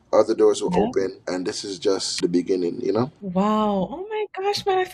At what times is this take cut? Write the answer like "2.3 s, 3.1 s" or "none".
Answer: 1.6 s, 3.2 s